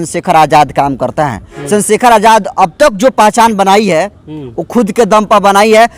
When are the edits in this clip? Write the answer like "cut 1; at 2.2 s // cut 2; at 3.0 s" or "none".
cut 1; at 1.5 s